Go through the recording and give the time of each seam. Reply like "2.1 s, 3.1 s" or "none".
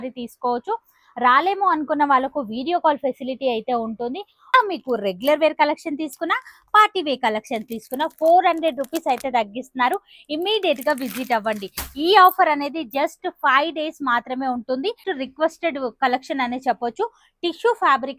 4.5 s, 15.1 s